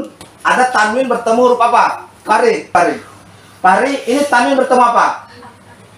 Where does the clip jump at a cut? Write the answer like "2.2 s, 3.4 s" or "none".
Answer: 2.7 s